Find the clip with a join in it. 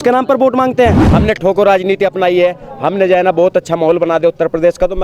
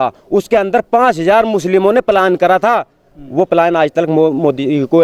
first; 1 cut; at 1.1 s

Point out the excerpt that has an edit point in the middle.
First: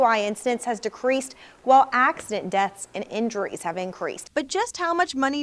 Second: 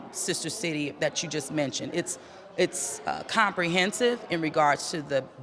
first; 1 cut; at 4.2 s

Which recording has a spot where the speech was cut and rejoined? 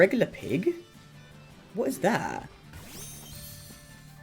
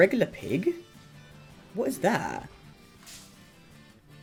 first; 1 cut; at 2.7 s

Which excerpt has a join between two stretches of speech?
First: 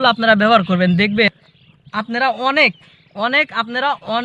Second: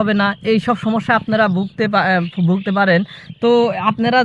first; 1 cut; at 1.3 s

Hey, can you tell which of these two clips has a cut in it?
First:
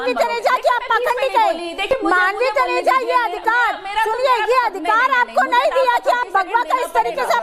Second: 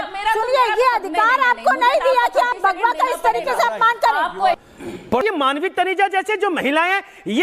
second; 1 cut; at 5.2 s

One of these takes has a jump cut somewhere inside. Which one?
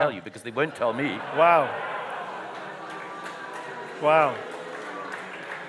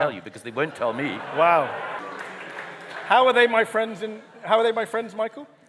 second; 1 cut; at 2.0 s

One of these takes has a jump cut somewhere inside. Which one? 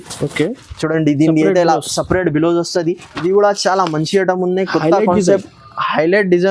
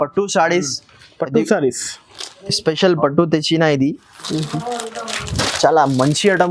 first; 1 cut; at 3.1 s

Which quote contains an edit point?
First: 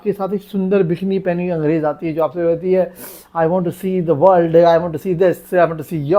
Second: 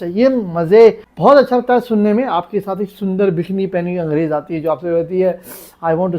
second; 1 cut; at 1.1 s

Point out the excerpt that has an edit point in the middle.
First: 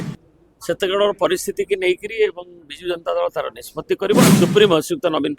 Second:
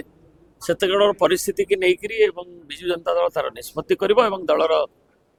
first; 1 cut; at 4.3 s

